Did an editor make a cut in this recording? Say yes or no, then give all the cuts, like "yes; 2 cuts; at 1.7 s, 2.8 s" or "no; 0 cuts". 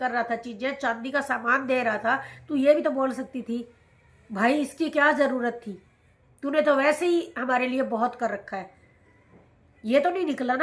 no; 0 cuts